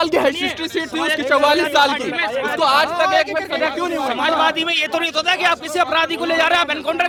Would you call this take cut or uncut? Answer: uncut